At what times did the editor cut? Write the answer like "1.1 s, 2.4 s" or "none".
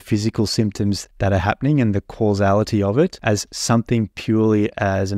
1.1 s, 3.2 s